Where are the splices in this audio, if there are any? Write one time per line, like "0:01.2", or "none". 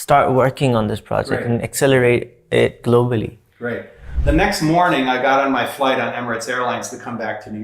0:04.0